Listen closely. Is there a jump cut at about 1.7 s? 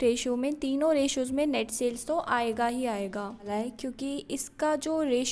no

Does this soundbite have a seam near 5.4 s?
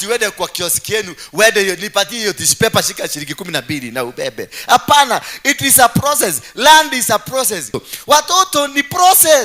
no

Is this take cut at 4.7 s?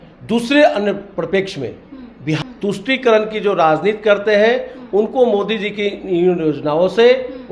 no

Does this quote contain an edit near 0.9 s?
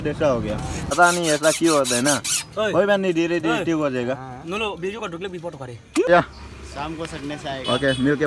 yes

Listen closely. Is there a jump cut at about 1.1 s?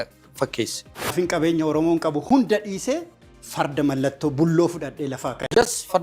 yes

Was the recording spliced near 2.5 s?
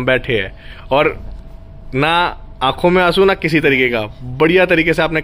no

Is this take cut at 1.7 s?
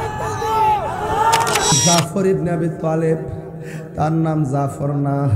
yes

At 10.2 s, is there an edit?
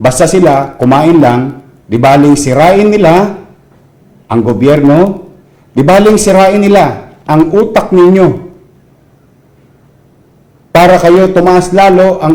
no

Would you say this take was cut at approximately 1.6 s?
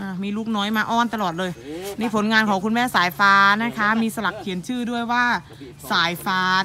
no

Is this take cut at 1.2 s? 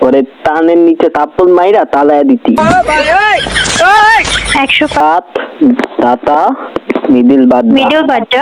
no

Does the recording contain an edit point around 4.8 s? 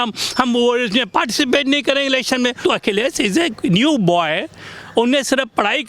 no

